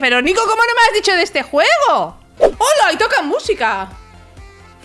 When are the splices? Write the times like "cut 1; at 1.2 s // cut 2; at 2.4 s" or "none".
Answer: cut 1; at 2.4 s